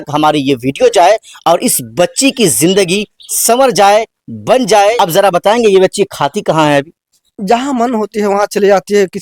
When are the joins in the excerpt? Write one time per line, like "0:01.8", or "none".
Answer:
0:05.0